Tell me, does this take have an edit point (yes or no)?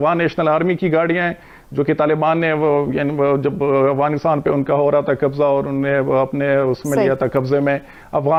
no